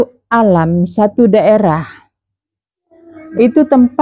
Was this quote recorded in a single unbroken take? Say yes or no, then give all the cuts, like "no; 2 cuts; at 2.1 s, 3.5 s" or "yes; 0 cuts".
yes; 0 cuts